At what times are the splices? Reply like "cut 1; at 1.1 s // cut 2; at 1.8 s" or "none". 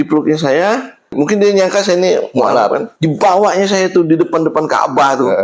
none